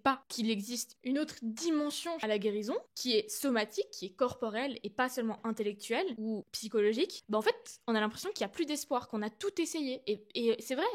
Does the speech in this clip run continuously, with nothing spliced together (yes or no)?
no